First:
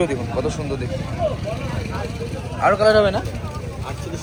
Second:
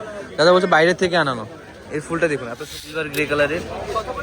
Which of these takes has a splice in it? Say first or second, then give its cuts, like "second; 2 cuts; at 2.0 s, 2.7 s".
second; 1 cut; at 2.7 s